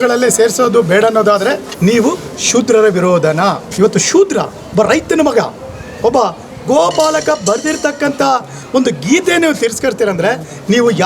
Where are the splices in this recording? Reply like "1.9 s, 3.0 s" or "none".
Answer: 1.7 s, 3.7 s